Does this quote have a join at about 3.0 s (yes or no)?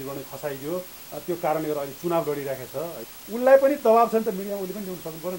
yes